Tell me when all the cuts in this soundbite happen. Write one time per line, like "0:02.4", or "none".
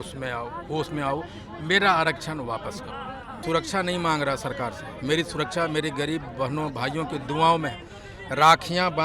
0:03.4